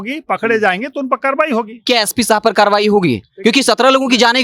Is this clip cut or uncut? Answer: cut